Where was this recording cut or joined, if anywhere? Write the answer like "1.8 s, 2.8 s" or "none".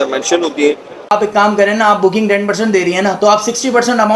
1.1 s